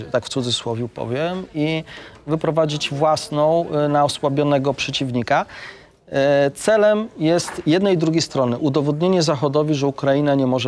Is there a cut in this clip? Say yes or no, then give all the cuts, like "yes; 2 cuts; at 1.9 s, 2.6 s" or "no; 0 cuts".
no; 0 cuts